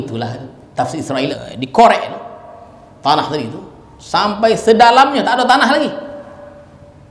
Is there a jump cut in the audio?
yes; 1 cut; at 1.3 s

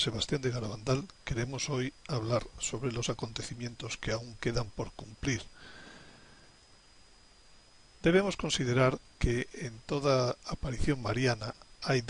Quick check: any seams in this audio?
yes; 1 cut; at 9.1 s

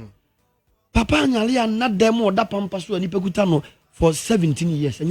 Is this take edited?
no; 0 cuts

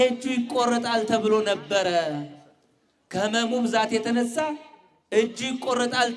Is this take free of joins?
yes; 0 cuts

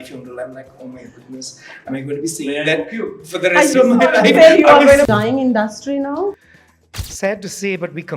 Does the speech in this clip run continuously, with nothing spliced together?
no; 1 cut; at 5.1 s

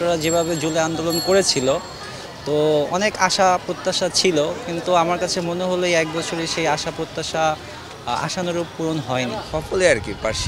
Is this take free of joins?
no; 1 cut; at 9.4 s

